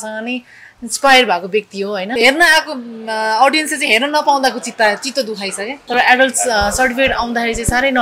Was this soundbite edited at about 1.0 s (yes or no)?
no